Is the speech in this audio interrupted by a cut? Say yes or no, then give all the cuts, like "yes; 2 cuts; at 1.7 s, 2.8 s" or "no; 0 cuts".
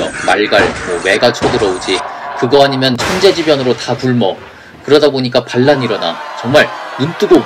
no; 0 cuts